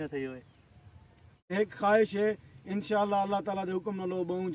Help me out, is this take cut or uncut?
cut